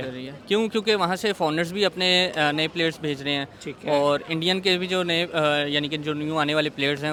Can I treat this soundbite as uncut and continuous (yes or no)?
yes